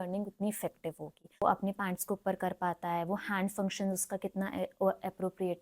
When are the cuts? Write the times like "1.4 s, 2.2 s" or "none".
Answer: 1.4 s